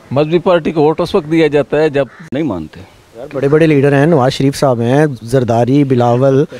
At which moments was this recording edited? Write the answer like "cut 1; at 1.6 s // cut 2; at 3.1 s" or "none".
cut 1; at 2.2 s